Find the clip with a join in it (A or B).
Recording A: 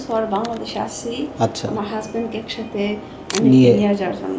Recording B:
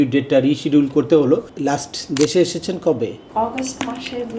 B